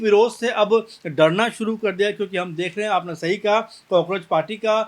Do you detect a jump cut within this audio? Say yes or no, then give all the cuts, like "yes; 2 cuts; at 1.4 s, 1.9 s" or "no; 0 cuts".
no; 0 cuts